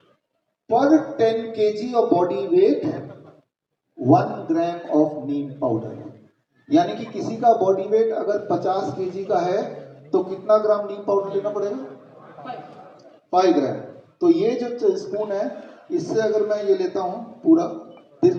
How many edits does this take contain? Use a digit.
0